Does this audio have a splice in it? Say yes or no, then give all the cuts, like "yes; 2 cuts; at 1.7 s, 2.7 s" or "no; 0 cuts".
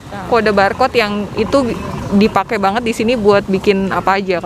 no; 0 cuts